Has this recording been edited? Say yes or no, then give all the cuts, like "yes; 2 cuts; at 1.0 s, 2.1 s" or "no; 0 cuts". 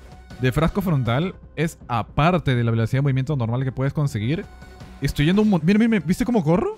no; 0 cuts